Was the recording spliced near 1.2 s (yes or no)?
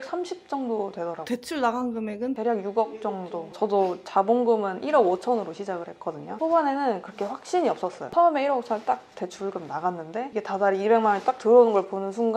yes